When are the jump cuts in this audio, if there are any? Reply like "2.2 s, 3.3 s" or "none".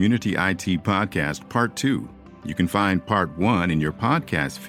none